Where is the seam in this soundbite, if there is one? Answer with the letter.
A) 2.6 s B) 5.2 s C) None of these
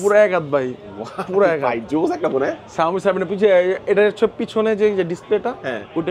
C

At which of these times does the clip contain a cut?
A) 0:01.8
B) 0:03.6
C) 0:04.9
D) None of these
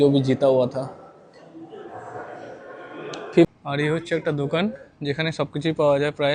B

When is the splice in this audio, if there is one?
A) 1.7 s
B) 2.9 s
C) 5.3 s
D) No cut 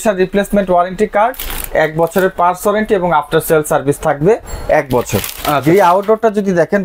D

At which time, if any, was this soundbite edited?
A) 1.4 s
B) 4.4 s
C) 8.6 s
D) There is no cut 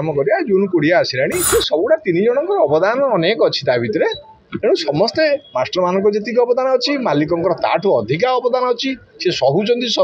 A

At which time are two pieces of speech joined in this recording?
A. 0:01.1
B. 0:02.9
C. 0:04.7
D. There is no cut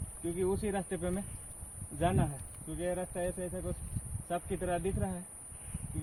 D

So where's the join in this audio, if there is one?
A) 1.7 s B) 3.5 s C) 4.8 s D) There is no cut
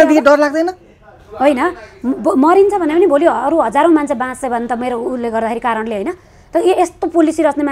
D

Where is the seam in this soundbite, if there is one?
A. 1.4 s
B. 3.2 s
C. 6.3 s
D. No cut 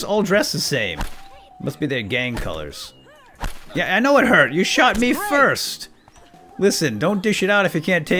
D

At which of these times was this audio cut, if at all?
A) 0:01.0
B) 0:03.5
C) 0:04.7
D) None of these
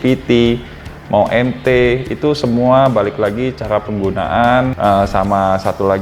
C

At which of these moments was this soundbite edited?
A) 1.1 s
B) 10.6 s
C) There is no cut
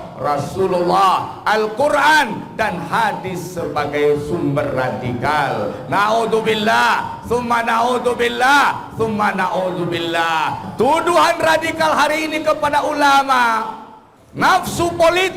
B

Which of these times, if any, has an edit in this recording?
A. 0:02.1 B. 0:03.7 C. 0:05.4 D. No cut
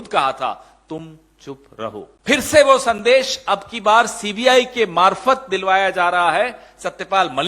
A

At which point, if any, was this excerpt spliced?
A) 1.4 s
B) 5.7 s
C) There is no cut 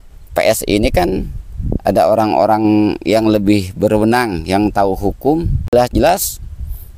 B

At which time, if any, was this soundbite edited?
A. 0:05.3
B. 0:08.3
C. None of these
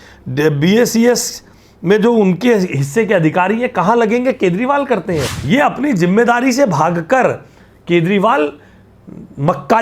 A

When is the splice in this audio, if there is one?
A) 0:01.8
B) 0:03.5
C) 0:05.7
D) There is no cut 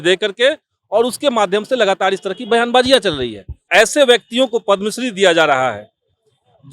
B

